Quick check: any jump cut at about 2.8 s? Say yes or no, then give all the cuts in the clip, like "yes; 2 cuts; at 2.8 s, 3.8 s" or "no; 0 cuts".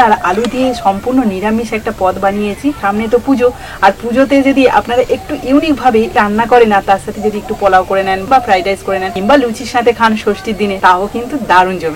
yes; 4 cuts; at 2.8 s, 6.1 s, 8.2 s, 9.1 s